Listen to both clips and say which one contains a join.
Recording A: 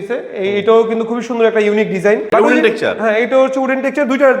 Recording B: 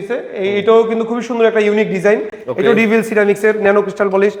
A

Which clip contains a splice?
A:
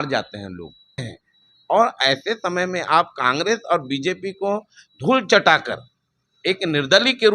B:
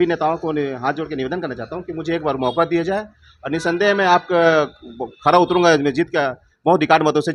A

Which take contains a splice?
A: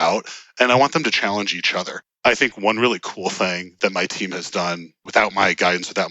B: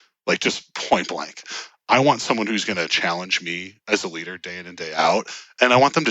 A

